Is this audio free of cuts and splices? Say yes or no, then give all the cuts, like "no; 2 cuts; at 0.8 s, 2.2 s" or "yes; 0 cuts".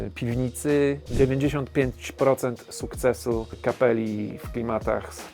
no; 2 cuts; at 1.1 s, 3.6 s